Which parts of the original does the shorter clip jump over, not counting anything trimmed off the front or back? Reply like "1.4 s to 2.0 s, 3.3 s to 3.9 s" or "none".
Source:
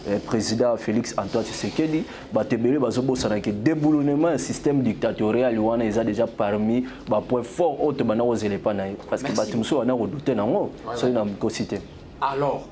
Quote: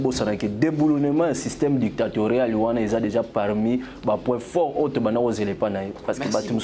none